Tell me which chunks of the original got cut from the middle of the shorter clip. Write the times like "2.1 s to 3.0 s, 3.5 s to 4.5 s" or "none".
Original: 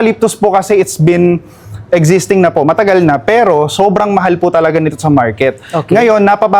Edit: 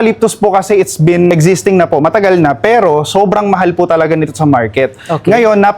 1.3 s to 1.9 s